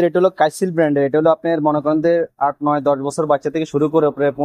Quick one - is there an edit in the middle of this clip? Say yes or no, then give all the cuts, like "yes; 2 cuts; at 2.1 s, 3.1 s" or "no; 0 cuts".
no; 0 cuts